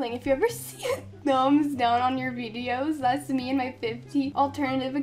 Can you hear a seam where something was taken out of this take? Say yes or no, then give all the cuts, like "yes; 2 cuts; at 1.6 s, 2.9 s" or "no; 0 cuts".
no; 0 cuts